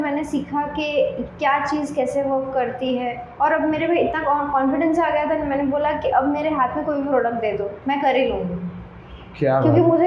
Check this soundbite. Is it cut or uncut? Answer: uncut